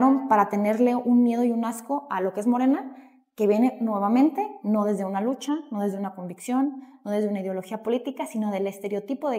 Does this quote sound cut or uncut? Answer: uncut